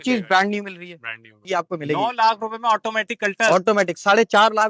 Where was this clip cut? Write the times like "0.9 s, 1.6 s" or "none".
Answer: 1.4 s